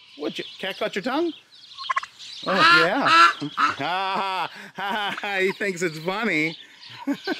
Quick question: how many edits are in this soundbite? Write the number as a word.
zero